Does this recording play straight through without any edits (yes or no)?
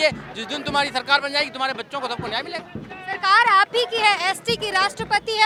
yes